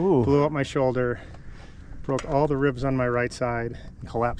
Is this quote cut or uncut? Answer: uncut